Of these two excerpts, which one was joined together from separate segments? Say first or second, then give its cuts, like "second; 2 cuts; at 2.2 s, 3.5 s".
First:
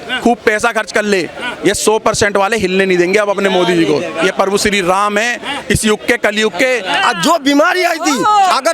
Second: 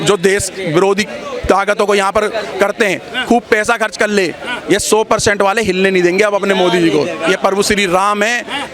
first; 1 cut; at 6.9 s